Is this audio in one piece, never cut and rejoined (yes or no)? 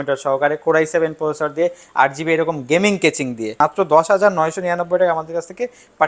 no